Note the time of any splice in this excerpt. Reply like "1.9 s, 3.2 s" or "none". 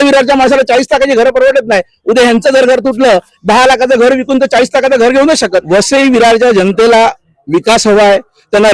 5.5 s